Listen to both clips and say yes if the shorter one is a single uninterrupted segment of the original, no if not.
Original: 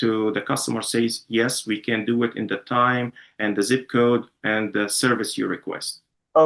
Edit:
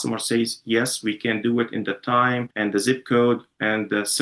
no